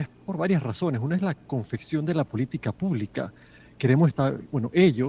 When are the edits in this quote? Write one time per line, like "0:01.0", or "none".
none